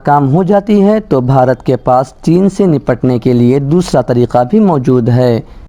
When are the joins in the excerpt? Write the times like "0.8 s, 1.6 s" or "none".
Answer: none